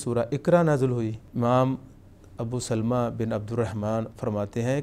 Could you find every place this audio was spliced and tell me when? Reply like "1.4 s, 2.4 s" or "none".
1.3 s